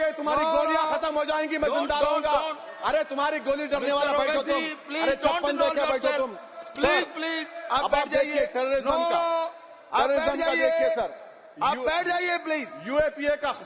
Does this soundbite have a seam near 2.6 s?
no; 0 cuts

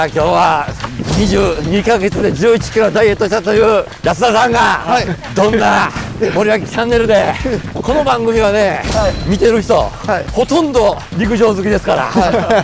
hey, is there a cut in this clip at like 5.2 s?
yes; 7 cuts; at 3.9 s, 5.2 s, 6.0 s, 7.7 s, 9.2 s, 10.3 s, 11.1 s

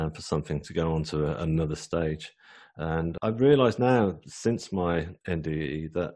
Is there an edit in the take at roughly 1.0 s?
no; 1 cut; at 3.1 s

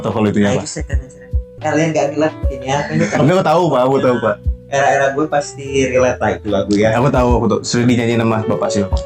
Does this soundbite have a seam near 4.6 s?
no; 1 cut; at 1.5 s

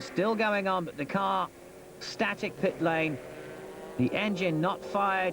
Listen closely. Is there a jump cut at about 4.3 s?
no; 1 cut; at 2.6 s

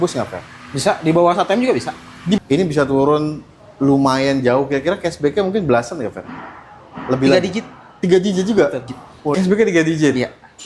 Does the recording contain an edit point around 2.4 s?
yes; 2 cuts; at 2.4 s, 9.3 s

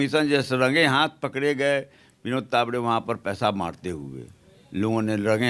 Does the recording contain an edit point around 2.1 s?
no; 0 cuts

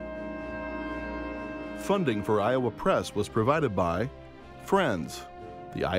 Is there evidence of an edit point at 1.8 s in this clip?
yes; 1 cut; at 1.8 s

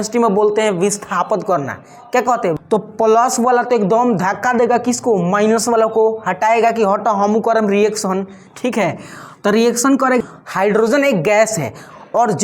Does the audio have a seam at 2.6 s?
yes; 2 cuts; at 2.6 s, 10.2 s

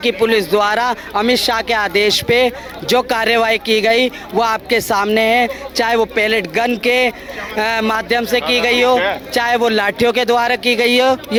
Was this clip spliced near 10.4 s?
no; 0 cuts

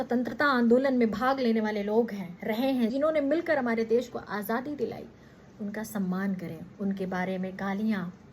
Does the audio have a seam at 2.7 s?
yes; 1 cut; at 2.7 s

